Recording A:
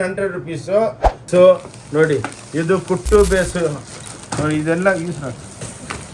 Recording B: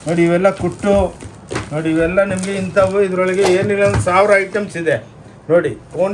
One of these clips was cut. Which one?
A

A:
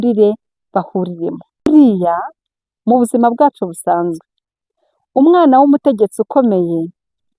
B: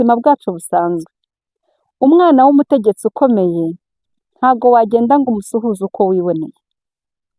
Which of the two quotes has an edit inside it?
A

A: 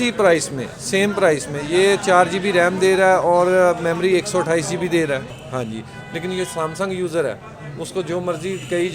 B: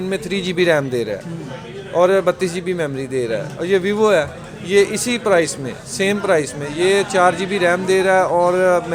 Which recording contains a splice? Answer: A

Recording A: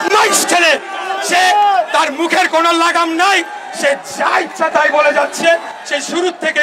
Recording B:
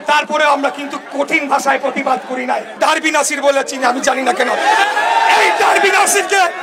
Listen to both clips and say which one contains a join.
B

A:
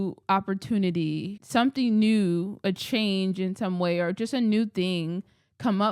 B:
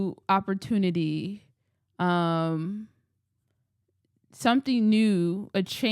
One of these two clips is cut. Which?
A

